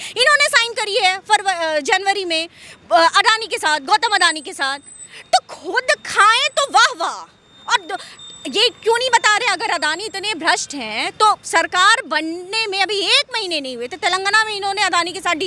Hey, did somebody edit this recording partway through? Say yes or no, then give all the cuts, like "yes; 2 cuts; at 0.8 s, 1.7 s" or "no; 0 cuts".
no; 0 cuts